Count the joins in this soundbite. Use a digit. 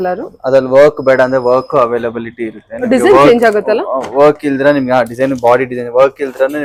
0